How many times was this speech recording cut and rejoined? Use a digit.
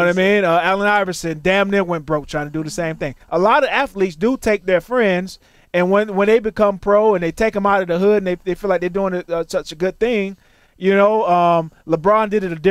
0